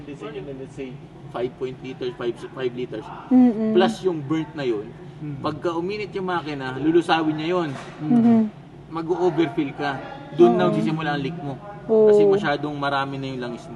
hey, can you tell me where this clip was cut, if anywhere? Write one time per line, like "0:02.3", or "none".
none